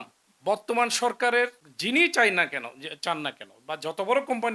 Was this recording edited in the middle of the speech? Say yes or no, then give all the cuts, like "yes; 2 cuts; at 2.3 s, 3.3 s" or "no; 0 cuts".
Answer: yes; 1 cut; at 1.7 s